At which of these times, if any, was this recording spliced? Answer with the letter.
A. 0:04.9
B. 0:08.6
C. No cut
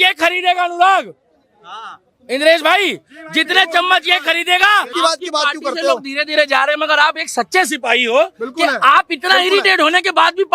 A